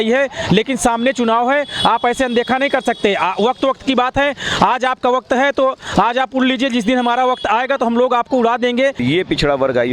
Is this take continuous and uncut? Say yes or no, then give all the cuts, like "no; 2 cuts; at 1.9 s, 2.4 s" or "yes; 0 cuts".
no; 1 cut; at 9.0 s